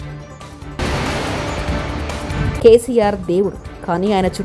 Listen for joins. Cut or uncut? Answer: cut